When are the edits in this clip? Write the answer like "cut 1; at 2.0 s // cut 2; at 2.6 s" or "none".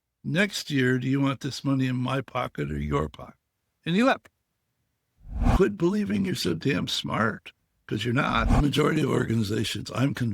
cut 1; at 5.5 s // cut 2; at 8.5 s